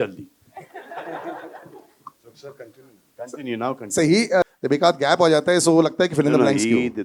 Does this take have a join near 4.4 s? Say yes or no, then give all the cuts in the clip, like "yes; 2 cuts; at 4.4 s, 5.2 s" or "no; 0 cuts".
yes; 1 cut; at 4.4 s